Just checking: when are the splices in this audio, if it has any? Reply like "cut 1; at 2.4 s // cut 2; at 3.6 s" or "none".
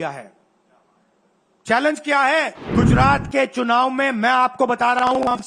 cut 1; at 2.6 s